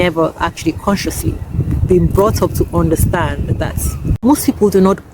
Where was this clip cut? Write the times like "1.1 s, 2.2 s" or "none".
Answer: 1.5 s, 4.2 s